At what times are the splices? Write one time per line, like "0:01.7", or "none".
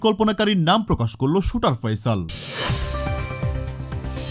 0:02.4